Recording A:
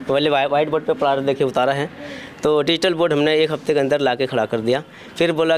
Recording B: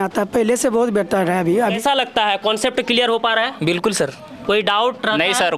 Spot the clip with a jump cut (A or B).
B